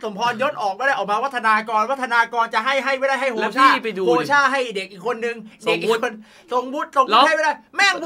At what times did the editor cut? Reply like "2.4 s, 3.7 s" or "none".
none

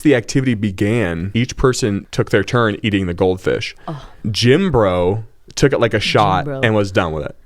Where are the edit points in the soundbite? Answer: 1.2 s, 2.1 s, 4.2 s

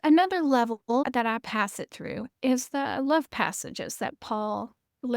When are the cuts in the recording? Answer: 1.0 s, 2.3 s

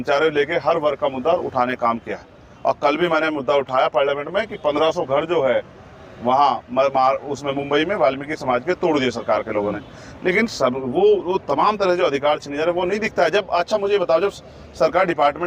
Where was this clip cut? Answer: none

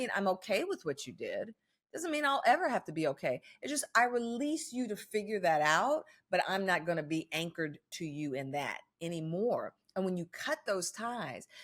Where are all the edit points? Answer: none

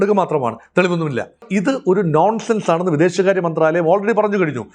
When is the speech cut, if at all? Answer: 1.5 s

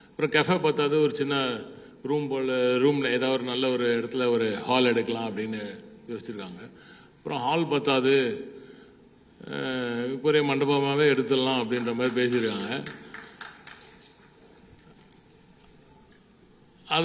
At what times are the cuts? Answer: 3.2 s

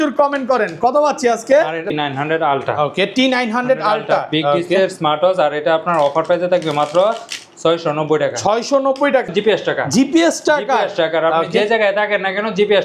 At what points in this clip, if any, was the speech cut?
1.9 s, 9.3 s

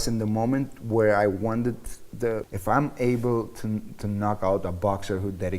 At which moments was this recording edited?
2.5 s

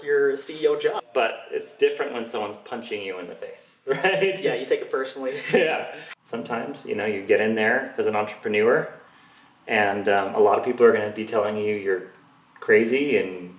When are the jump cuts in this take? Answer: 1.0 s, 6.0 s

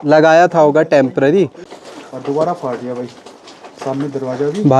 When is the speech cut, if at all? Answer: 1.7 s

